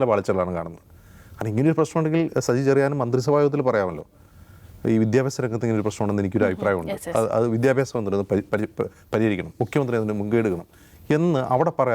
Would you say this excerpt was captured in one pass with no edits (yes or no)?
yes